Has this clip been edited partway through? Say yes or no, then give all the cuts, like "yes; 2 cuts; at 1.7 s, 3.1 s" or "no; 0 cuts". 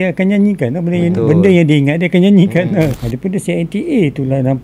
yes; 1 cut; at 3.0 s